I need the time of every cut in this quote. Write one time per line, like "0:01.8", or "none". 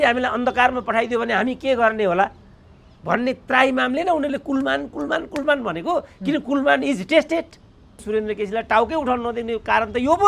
0:07.9